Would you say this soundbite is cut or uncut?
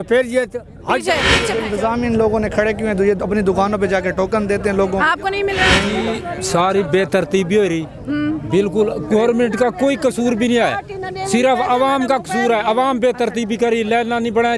cut